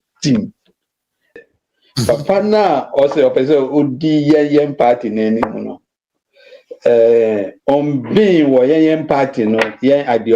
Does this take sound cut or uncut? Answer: cut